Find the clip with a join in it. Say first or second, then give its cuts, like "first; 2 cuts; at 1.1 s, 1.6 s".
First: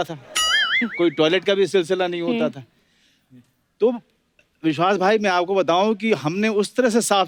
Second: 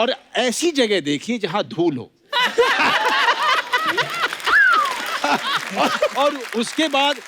second; 1 cut; at 5.2 s